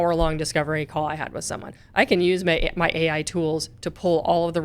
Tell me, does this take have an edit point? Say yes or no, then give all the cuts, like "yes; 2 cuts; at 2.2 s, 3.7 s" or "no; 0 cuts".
no; 0 cuts